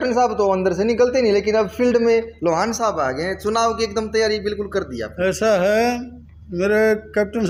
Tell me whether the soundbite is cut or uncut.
uncut